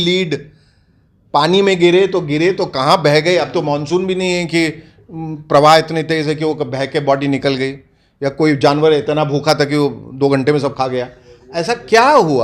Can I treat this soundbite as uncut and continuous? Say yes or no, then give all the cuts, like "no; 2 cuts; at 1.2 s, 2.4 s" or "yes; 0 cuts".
yes; 0 cuts